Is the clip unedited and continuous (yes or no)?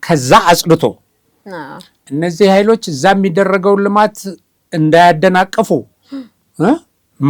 yes